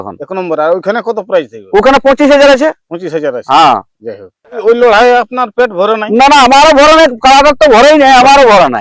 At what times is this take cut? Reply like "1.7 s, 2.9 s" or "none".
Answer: 4.6 s